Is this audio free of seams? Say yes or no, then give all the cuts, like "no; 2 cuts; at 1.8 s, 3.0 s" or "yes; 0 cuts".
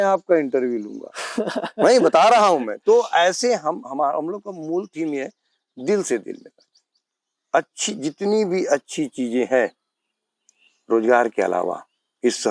yes; 0 cuts